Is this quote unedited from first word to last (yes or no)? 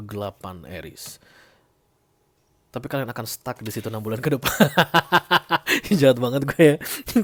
yes